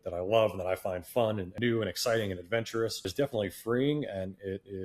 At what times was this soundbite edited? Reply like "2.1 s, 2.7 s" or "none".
1.5 s, 3.1 s